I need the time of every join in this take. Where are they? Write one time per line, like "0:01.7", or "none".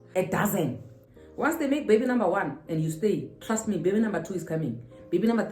0:01.0